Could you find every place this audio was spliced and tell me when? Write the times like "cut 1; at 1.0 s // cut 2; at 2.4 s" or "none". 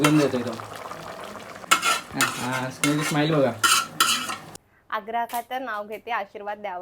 cut 1; at 1.6 s // cut 2; at 4.5 s